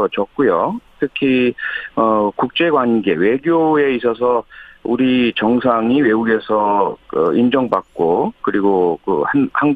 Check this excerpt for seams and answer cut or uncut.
cut